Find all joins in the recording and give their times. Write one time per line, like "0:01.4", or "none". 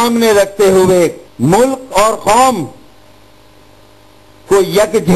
0:01.3